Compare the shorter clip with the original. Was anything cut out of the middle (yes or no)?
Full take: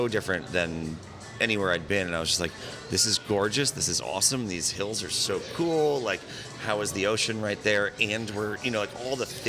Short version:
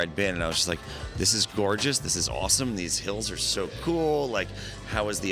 no